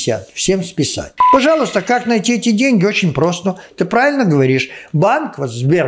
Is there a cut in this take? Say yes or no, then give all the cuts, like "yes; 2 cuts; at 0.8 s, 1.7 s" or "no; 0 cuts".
yes; 1 cut; at 1.1 s